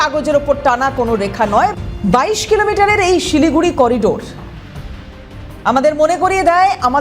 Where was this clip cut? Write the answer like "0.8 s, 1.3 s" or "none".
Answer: 1.7 s